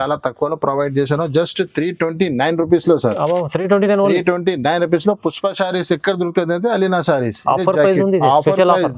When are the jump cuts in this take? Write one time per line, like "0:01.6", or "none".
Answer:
none